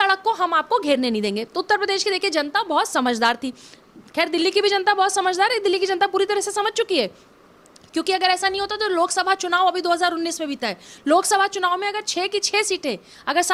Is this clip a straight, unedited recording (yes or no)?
yes